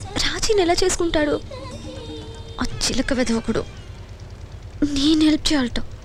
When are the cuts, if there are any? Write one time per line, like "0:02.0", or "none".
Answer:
none